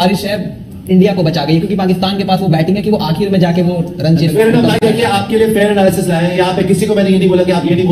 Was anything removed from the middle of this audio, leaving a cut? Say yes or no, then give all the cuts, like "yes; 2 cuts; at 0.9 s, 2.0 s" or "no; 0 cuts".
no; 0 cuts